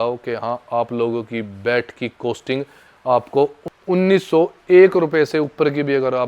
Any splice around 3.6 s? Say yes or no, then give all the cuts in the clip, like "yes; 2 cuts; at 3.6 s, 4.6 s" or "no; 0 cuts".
yes; 1 cut; at 3.6 s